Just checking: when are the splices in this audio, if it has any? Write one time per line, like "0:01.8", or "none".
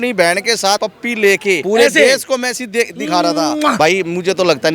0:00.8
0:01.6
0:03.8